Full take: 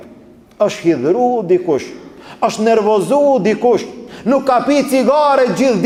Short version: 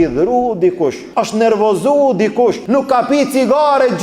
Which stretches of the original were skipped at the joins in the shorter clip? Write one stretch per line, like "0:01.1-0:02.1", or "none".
0:01.9-0:02.3
0:03.9-0:04.2